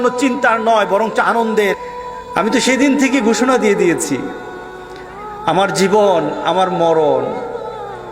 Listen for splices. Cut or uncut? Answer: cut